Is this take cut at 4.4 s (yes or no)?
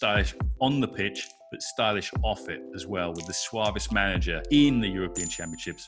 yes